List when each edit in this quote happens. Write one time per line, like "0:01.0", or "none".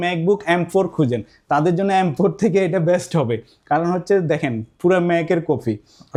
none